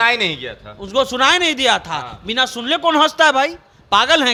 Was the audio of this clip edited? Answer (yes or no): no